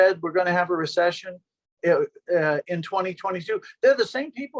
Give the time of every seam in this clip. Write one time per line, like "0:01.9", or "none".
none